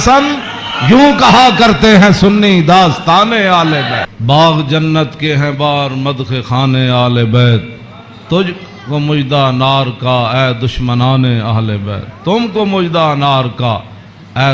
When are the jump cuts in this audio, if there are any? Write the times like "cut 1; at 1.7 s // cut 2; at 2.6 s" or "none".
cut 1; at 4.2 s